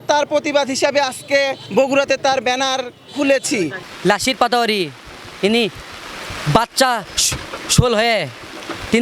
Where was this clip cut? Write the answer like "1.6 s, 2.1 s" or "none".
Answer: 1.6 s, 3.8 s